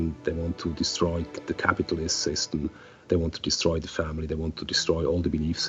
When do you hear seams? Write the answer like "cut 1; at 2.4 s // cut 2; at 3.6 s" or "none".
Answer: cut 1; at 3.1 s